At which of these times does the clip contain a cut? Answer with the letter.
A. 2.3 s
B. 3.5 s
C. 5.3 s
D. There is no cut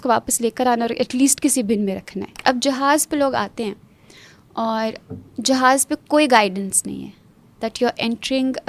A